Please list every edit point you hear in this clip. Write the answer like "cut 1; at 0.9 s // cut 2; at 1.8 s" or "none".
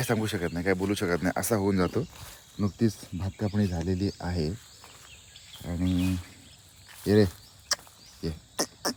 none